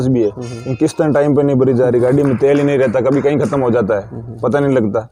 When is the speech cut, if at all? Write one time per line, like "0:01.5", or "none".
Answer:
none

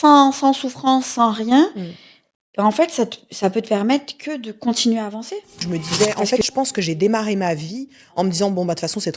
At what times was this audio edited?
0:05.6

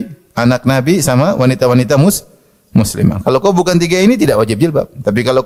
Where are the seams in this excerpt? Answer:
none

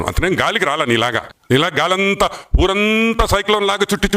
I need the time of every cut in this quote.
0:01.3

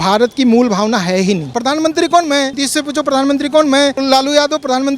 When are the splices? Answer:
0:01.5
0:02.6
0:04.0

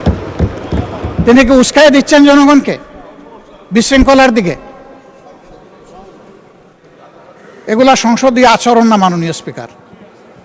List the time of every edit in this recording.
none

